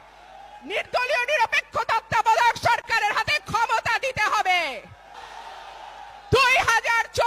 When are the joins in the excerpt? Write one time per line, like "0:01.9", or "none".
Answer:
0:05.1